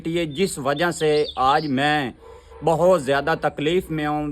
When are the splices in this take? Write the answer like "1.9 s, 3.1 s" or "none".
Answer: none